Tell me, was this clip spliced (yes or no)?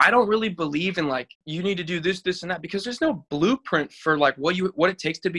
yes